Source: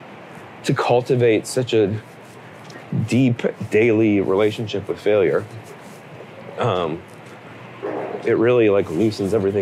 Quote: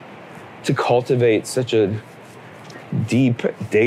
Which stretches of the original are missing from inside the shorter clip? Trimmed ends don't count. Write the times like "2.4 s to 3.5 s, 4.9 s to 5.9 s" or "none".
none